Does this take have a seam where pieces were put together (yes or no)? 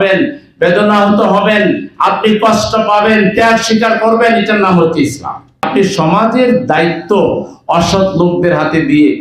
yes